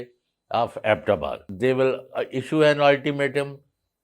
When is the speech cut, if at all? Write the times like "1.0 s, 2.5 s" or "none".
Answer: 1.4 s